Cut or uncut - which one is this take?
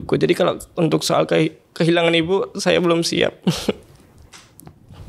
uncut